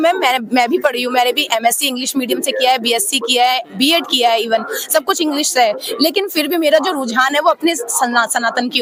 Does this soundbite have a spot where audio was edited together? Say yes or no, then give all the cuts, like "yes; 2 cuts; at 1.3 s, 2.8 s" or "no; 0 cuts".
no; 0 cuts